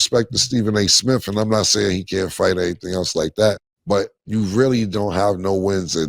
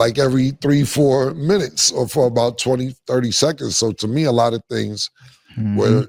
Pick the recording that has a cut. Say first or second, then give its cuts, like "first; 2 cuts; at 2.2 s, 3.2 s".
first; 1 cut; at 4.1 s